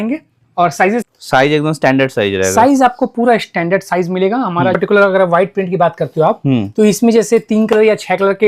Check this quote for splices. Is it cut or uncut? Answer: cut